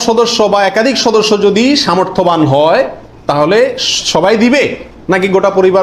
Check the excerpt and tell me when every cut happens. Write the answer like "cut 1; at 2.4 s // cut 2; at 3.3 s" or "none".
none